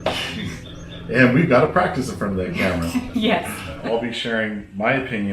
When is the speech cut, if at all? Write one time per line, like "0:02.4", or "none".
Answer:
0:03.8